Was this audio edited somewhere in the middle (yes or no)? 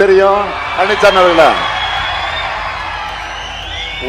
yes